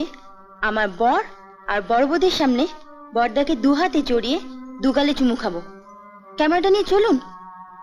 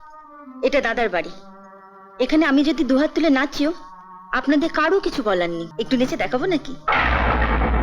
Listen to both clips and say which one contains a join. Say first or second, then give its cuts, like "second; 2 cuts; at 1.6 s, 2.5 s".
second; 1 cut; at 5.7 s